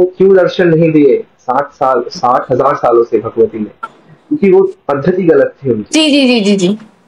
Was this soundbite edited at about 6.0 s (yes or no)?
no